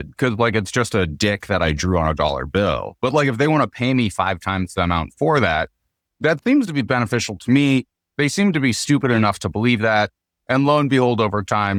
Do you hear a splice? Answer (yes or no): no